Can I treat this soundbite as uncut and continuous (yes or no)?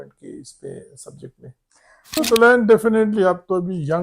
no